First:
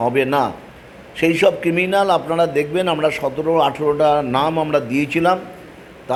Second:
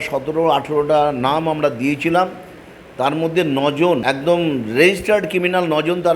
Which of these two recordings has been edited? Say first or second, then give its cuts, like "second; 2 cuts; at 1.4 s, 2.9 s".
second; 1 cut; at 4.0 s